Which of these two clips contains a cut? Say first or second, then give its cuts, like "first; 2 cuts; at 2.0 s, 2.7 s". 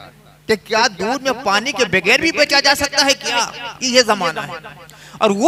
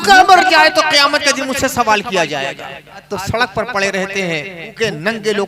second; 2 cuts; at 3.1 s, 4.7 s